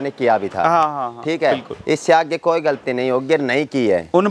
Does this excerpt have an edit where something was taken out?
no; 0 cuts

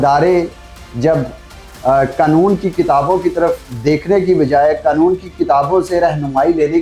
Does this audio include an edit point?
no; 0 cuts

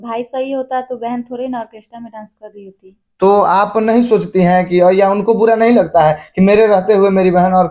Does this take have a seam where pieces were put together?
no; 0 cuts

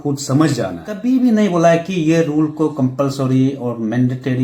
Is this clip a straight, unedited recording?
no; 1 cut; at 0.9 s

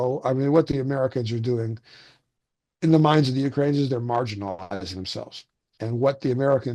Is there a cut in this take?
no; 0 cuts

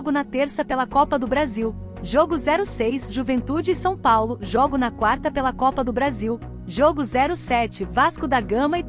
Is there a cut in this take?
yes; 2 cuts; at 1.9 s, 6.5 s

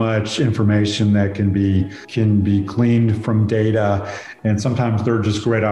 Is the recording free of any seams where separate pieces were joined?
no; 2 cuts; at 2.0 s, 4.3 s

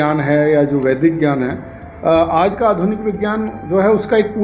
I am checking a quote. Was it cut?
no; 0 cuts

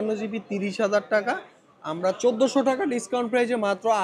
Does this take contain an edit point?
no; 0 cuts

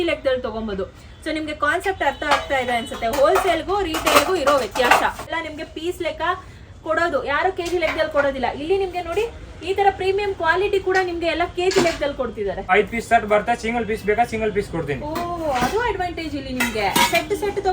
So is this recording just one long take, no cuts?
no; 2 cuts; at 5.3 s, 12.7 s

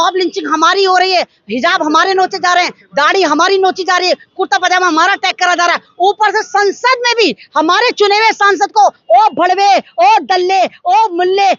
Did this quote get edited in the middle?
no; 0 cuts

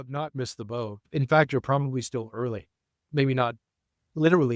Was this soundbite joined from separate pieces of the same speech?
yes; 2 cuts; at 1.0 s, 3.0 s

